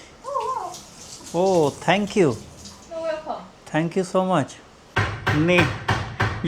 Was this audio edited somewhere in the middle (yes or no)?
yes